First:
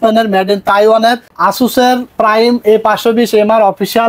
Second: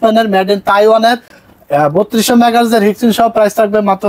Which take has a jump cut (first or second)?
first